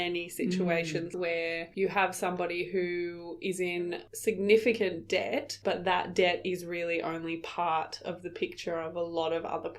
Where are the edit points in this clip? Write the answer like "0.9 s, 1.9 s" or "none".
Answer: 1.1 s, 5.5 s